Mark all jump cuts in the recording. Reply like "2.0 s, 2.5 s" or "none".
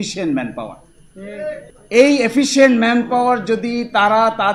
1.7 s